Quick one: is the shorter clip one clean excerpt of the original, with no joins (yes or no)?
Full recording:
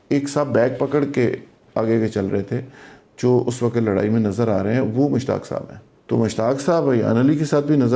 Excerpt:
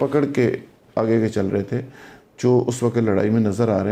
yes